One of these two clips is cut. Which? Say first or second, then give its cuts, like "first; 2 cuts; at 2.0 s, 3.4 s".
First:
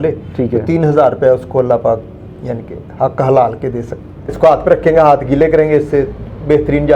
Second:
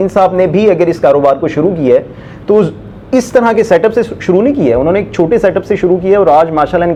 first; 1 cut; at 4.3 s